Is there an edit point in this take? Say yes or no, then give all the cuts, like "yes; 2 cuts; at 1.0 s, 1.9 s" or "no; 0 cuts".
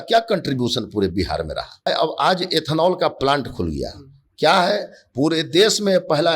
yes; 1 cut; at 1.9 s